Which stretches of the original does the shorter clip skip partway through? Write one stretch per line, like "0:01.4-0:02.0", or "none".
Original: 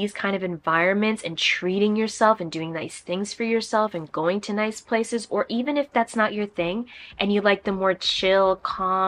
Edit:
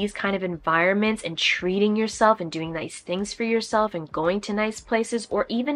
none